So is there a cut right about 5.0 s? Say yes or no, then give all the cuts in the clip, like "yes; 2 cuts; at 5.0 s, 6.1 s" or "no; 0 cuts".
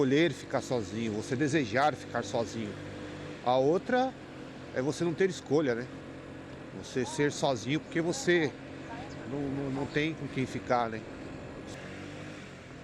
no; 1 cut; at 11.5 s